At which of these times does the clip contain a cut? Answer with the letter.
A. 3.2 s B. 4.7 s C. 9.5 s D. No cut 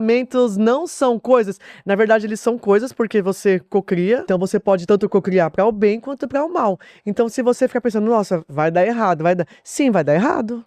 B